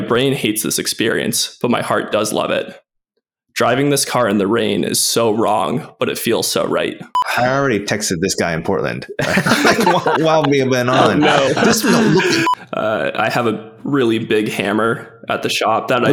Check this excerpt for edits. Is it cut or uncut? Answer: cut